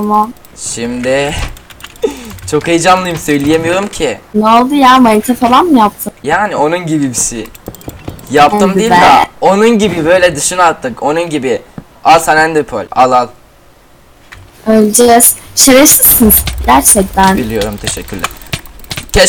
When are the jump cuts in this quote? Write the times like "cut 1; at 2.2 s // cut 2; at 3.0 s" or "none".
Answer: cut 1; at 4.2 s // cut 2; at 6.1 s // cut 3; at 12.9 s